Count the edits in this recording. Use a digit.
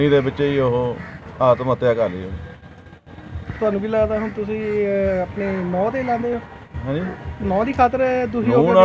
0